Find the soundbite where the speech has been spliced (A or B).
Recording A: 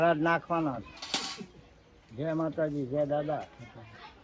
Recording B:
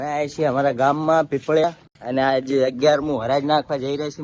B